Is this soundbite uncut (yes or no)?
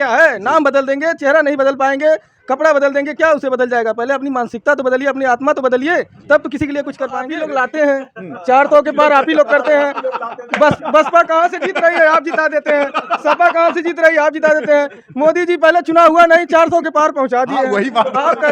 no